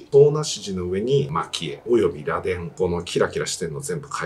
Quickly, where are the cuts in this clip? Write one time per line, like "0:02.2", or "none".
0:01.4
0:02.7